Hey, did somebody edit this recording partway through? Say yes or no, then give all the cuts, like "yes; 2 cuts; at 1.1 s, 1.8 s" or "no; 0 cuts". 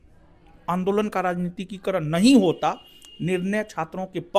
no; 0 cuts